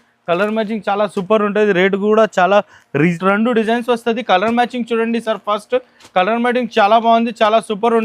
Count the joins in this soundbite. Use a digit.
1